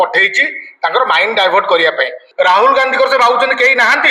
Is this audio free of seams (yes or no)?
no